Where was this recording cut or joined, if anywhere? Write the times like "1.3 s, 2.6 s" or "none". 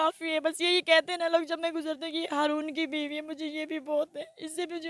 none